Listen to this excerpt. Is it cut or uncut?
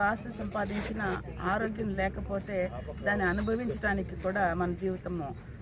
uncut